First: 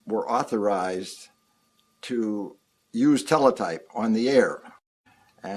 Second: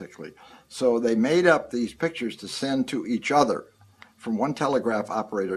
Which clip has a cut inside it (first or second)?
second